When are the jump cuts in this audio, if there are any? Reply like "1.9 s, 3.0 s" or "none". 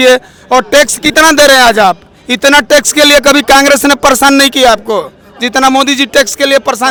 none